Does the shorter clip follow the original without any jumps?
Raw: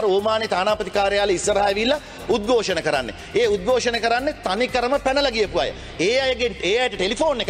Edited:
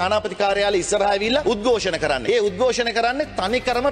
no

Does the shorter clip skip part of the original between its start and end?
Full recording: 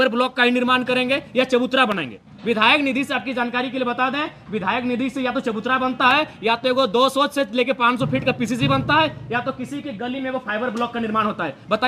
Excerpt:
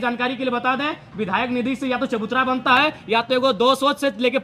no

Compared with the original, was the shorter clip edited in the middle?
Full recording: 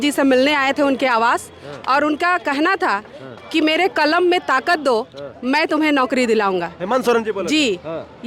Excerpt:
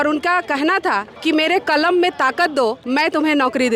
yes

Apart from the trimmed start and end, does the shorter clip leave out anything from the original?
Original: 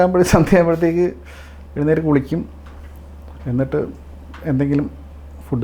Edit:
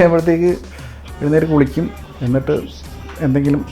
yes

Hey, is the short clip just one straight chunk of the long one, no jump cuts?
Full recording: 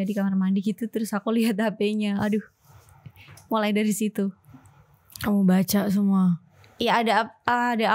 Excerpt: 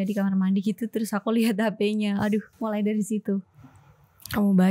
no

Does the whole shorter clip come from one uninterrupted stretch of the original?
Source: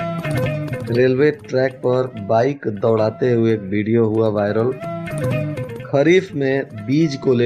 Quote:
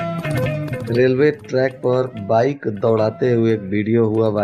yes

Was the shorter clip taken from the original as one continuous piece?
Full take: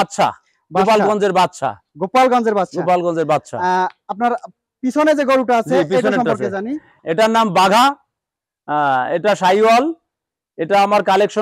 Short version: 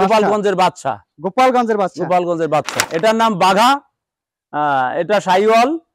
no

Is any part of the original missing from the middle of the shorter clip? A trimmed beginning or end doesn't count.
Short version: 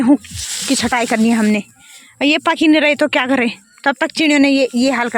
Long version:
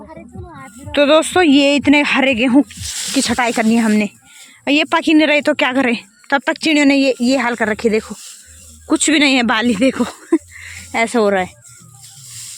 no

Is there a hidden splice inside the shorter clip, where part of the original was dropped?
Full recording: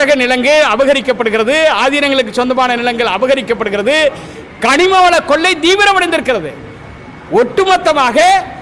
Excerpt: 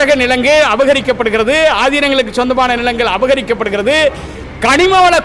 no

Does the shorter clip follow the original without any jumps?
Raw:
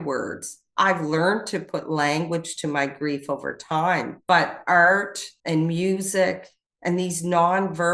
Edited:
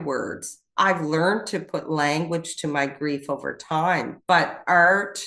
yes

